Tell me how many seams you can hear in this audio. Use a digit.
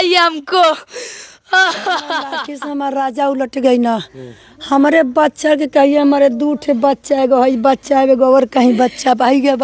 1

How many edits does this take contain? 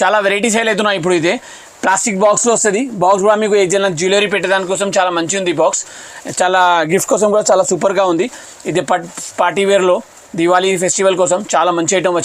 0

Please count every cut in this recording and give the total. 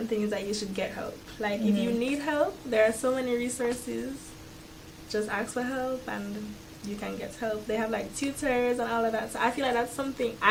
0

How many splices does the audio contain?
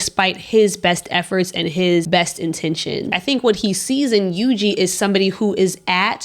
2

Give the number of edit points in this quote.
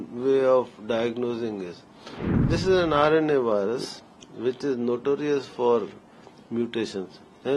1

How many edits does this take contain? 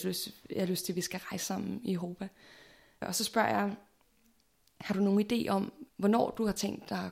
2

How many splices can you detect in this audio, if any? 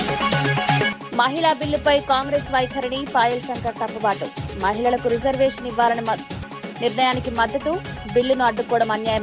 1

